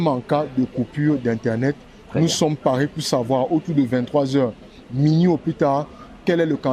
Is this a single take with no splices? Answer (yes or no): yes